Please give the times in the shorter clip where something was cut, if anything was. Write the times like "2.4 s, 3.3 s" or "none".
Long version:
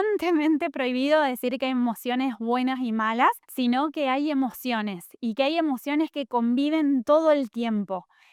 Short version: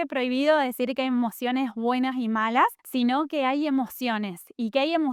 none